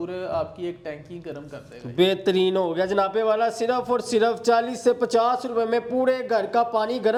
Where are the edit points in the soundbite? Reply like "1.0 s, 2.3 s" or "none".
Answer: none